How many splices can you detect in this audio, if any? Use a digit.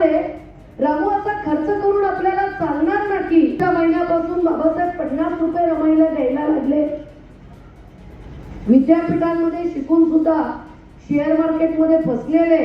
1